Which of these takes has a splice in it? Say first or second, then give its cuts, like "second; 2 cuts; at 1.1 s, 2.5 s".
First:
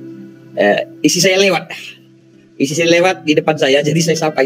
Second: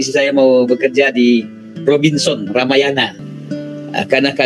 second; 1 cut; at 3.3 s